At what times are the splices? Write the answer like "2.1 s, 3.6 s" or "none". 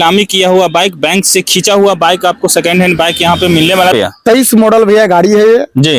3.9 s